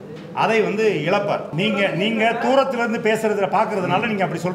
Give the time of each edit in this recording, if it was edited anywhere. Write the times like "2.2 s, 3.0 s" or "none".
1.5 s